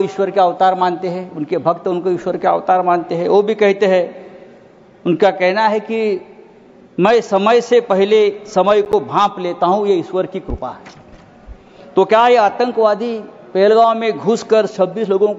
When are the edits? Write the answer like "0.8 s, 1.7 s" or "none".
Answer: none